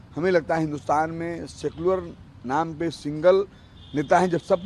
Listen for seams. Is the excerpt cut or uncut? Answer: uncut